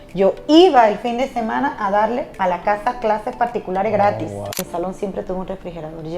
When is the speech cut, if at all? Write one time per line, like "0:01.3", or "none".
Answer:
0:02.3
0:04.6

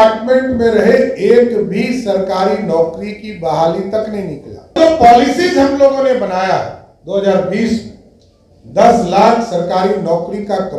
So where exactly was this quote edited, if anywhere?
0:04.8

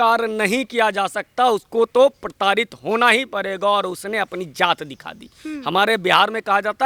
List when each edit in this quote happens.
none

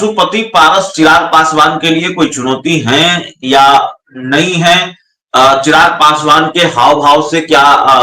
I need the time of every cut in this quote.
none

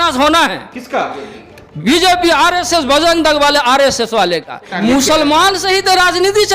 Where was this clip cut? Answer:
0:04.7

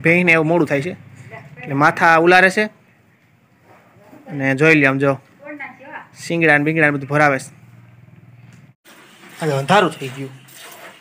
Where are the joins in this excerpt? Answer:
0:08.8

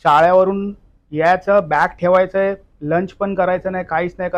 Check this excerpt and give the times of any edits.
none

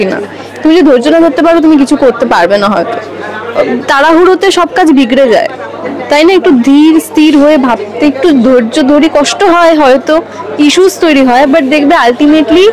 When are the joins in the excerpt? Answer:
none

